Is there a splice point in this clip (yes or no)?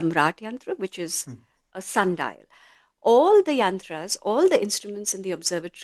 yes